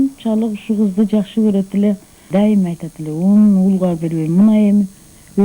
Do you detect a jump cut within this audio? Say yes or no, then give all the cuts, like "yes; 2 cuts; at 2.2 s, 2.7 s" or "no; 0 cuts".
no; 0 cuts